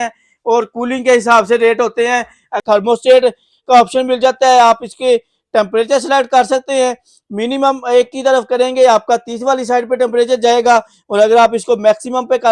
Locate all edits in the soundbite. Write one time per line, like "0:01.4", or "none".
0:02.6